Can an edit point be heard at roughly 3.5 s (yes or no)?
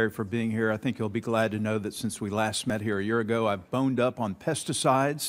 no